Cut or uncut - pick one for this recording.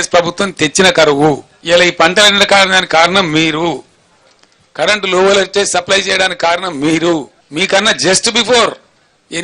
cut